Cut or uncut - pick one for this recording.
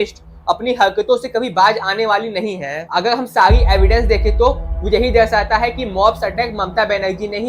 uncut